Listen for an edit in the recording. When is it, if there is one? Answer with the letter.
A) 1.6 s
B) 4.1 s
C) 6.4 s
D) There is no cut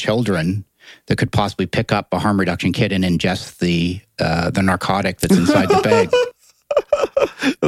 D